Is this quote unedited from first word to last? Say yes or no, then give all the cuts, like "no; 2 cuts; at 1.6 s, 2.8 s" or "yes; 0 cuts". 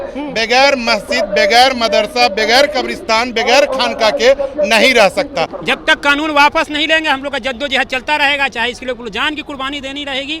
no; 1 cut; at 5.5 s